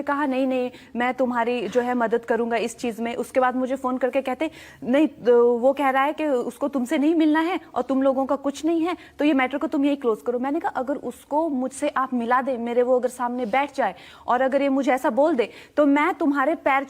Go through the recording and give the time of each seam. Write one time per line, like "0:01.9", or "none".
0:14.6